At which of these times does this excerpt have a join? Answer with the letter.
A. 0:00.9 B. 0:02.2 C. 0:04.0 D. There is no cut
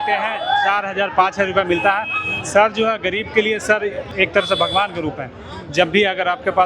C